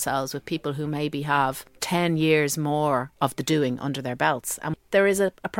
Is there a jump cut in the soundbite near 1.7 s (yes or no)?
yes